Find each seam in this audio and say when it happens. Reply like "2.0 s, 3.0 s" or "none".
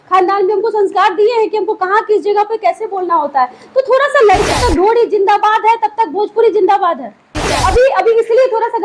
4.5 s, 7.5 s

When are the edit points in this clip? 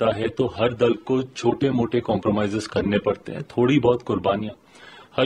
none

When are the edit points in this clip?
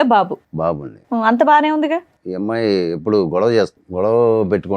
2.2 s, 3.8 s

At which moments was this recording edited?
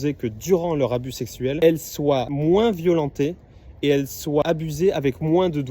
1.6 s, 2.3 s, 4.4 s

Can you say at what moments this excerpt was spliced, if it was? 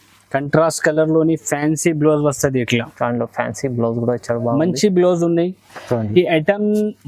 5.8 s

